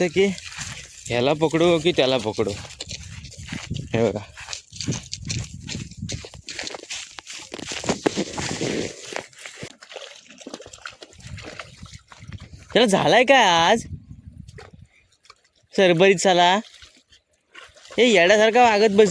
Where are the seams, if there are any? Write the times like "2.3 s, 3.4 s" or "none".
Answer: 9.7 s